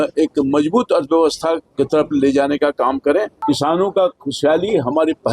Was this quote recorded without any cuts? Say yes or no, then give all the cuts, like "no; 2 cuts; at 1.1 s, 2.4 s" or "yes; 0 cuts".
no; 1 cut; at 3.3 s